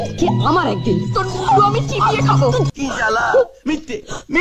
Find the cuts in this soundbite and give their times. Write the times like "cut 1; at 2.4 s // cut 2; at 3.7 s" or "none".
cut 1; at 2.7 s